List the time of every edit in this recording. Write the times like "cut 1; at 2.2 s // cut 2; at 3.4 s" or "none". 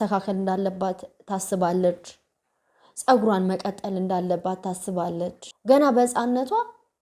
cut 1; at 5.5 s